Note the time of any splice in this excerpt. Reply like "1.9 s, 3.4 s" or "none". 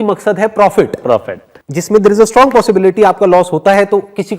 1.1 s